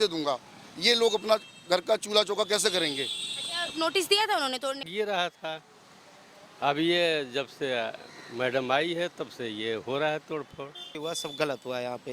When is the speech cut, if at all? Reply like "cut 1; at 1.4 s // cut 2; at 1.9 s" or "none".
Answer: cut 1; at 4.9 s // cut 2; at 11.0 s